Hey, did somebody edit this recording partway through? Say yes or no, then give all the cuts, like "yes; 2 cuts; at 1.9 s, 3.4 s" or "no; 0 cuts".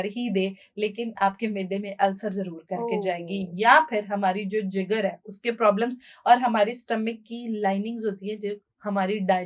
no; 0 cuts